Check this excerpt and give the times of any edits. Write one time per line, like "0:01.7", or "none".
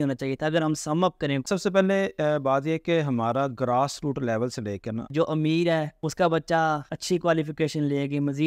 0:01.5
0:05.1
0:06.0
0:06.9